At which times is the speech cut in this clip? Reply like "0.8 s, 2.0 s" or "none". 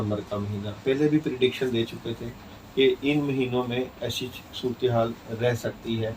none